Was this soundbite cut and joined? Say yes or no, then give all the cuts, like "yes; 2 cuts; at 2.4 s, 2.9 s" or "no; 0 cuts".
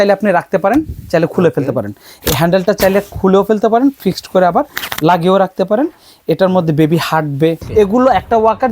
yes; 1 cut; at 7.6 s